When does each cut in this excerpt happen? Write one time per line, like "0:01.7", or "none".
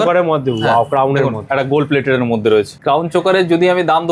0:02.8